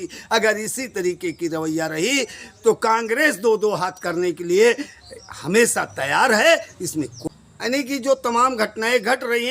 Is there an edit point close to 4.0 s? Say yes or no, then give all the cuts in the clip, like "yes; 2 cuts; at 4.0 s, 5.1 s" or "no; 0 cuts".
no; 1 cut; at 7.2 s